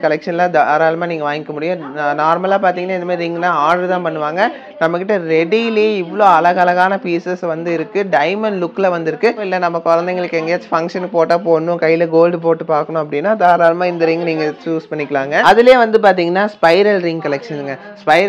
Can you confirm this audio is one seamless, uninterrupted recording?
no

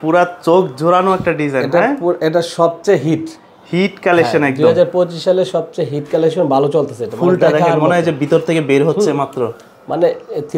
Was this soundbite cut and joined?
no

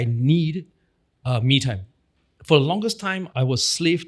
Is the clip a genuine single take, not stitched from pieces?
yes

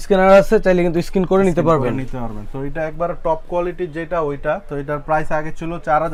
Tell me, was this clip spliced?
no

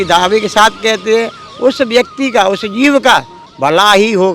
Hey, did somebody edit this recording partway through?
yes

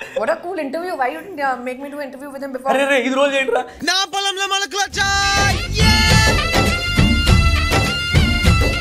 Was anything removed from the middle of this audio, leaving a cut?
no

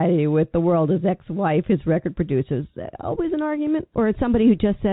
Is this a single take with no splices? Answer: no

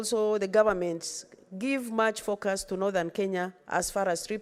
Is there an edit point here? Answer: no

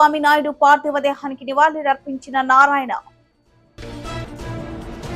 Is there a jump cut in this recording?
no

